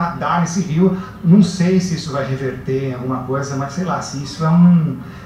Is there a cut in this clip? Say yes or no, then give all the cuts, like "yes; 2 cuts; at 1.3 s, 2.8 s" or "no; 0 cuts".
no; 0 cuts